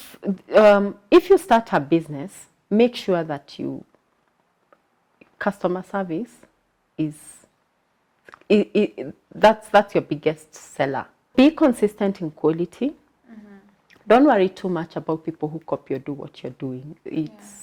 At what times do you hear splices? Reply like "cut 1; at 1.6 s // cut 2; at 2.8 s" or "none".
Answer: cut 1; at 11.3 s